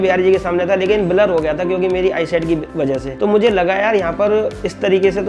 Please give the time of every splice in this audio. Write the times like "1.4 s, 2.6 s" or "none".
none